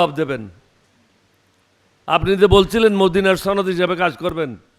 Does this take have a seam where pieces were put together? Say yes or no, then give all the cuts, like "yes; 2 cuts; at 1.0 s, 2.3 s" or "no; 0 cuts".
no; 0 cuts